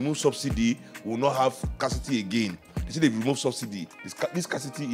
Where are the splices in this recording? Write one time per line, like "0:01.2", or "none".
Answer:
none